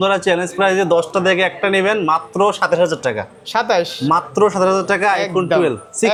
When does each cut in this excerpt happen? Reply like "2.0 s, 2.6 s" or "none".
none